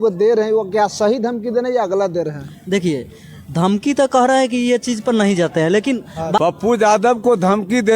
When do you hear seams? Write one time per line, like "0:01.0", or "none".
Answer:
0:06.4